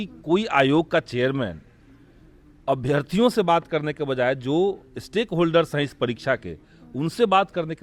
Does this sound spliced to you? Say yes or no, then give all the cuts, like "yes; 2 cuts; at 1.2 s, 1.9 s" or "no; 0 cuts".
no; 0 cuts